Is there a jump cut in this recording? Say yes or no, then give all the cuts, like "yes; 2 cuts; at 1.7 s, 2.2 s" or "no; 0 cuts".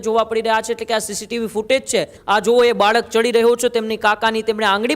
yes; 1 cut; at 2.2 s